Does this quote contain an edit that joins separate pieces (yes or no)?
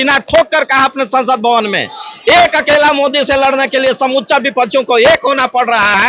no